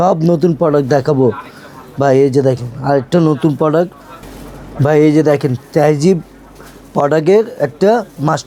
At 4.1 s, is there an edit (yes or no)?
no